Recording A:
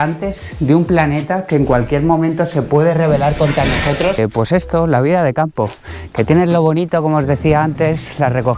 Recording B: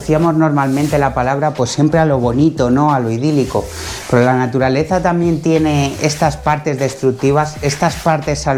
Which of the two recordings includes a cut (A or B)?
A